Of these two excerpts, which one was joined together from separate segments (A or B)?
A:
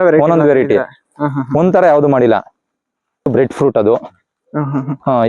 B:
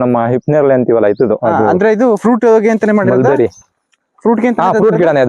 A